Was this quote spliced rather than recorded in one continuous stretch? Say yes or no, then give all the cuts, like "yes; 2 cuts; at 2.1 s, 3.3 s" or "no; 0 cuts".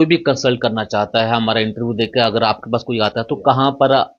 no; 0 cuts